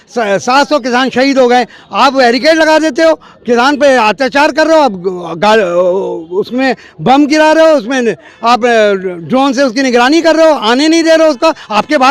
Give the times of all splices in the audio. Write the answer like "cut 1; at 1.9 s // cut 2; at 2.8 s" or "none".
none